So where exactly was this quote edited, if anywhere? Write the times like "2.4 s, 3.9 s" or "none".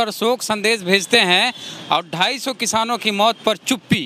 none